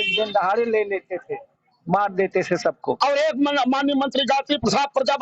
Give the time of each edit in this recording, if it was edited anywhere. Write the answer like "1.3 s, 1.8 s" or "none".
3.0 s